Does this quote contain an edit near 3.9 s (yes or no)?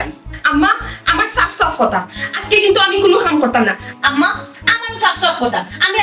yes